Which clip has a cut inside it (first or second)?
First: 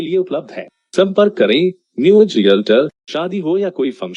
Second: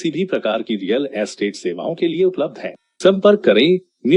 first